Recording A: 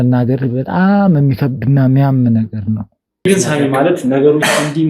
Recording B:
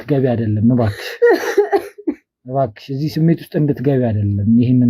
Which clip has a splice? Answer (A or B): A